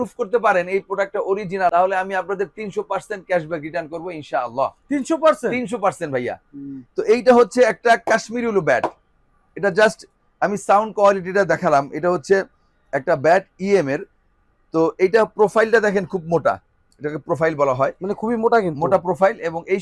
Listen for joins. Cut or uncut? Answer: uncut